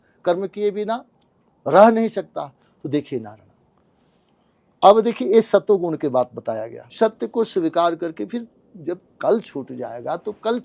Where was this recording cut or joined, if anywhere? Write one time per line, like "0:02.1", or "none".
0:06.8